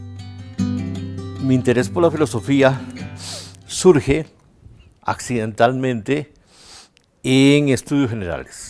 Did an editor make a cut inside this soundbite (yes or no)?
no